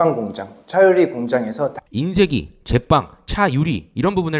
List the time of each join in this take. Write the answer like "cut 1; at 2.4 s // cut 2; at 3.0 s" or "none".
none